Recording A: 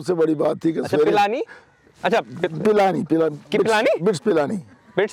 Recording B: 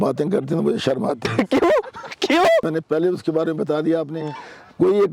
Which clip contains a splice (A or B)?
B